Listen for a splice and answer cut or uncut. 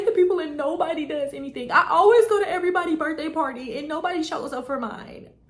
uncut